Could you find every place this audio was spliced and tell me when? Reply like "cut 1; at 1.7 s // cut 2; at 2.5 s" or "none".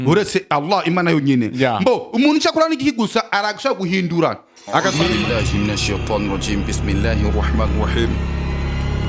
cut 1; at 5.1 s